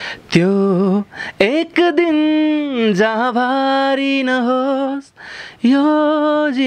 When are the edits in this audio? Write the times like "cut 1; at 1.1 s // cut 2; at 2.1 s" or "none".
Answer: none